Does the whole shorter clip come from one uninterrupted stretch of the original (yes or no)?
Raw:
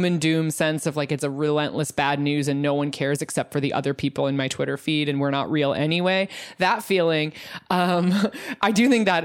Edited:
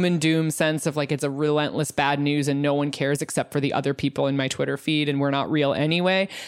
yes